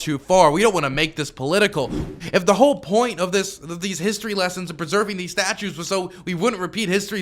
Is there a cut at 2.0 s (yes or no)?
yes